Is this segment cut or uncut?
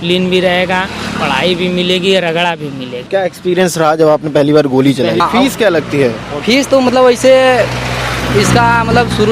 cut